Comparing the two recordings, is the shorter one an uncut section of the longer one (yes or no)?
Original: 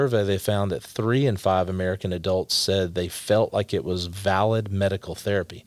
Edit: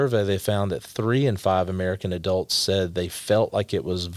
yes